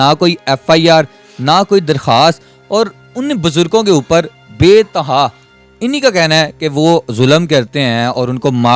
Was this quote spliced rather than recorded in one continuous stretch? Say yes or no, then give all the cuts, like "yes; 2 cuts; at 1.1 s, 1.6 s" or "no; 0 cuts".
no; 0 cuts